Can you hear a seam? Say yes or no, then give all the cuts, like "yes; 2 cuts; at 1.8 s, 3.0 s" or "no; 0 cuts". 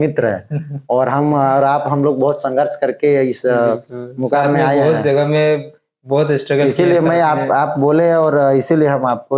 no; 0 cuts